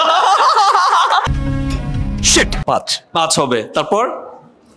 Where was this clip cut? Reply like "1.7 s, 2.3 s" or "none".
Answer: 2.6 s